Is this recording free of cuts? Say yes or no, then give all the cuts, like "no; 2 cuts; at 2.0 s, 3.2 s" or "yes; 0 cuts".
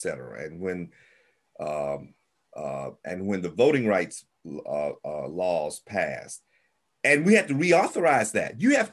yes; 0 cuts